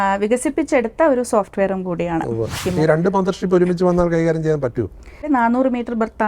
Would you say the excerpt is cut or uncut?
cut